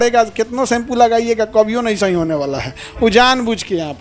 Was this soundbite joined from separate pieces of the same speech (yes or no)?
no